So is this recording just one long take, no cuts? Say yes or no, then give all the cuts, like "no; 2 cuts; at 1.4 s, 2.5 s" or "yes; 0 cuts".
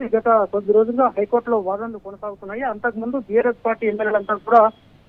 yes; 0 cuts